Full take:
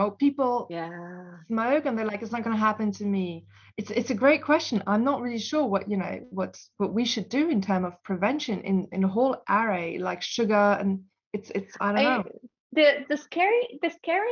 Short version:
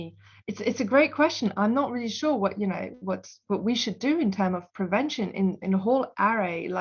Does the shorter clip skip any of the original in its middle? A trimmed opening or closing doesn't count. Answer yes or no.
no